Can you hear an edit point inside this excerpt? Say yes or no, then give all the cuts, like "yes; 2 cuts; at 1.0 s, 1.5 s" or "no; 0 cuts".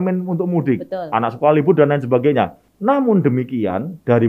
yes; 1 cut; at 2.6 s